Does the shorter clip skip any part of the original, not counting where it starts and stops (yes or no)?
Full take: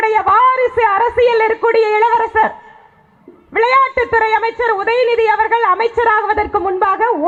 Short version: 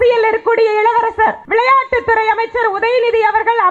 yes